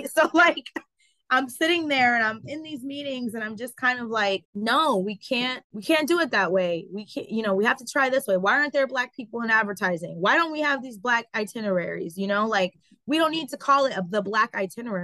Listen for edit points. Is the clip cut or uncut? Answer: cut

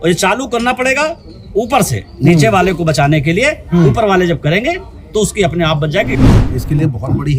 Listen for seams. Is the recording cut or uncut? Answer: cut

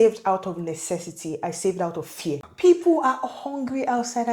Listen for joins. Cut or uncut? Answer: cut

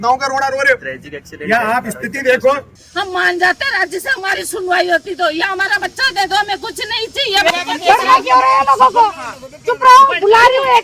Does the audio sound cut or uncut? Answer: cut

